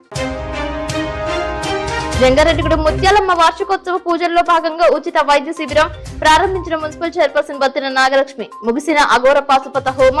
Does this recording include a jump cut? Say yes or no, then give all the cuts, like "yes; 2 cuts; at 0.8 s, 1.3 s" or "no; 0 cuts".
no; 0 cuts